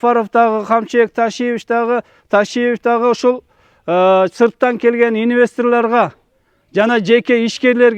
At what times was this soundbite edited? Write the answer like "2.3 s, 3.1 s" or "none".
none